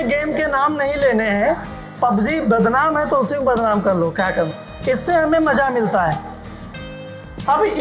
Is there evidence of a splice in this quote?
yes; 1 cut; at 4.6 s

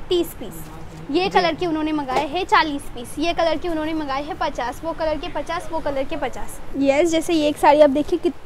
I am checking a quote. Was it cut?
yes; 1 cut; at 6.6 s

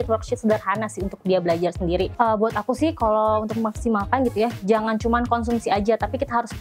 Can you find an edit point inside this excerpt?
yes; 1 cut; at 2.1 s

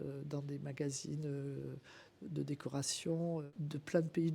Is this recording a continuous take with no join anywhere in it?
no; 1 cut; at 3.5 s

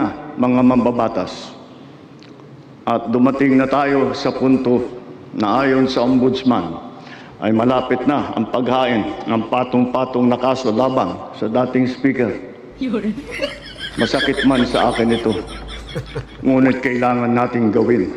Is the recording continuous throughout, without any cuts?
yes; 0 cuts

